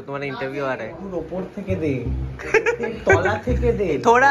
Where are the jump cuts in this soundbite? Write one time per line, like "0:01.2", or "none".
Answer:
0:01.1